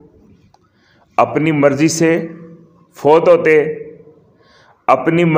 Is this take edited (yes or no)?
no